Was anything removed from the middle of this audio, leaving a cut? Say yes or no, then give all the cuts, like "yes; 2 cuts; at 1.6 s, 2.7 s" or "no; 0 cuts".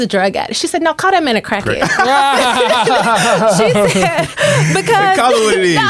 no; 0 cuts